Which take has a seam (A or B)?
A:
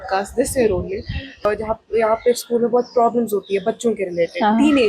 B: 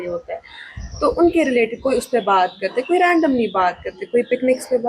A